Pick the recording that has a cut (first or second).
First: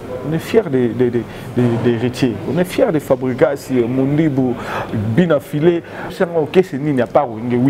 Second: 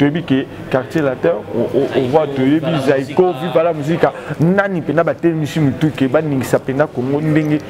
first